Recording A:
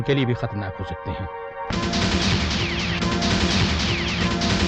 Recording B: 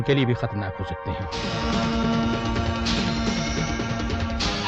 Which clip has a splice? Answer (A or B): B